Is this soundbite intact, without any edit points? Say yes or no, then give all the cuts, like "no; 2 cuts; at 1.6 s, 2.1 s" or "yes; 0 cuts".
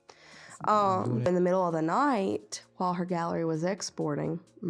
no; 1 cut; at 1.3 s